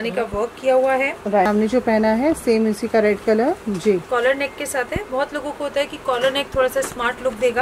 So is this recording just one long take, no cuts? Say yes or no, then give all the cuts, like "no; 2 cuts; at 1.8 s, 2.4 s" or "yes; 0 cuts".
no; 1 cut; at 1.5 s